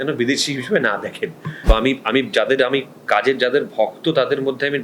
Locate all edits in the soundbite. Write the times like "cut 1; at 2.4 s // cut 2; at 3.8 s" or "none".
cut 1; at 1.7 s